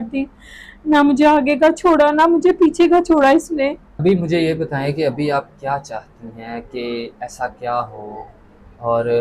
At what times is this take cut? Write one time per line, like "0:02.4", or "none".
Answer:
none